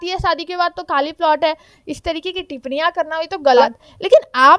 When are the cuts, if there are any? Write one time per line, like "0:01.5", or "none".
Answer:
0:03.6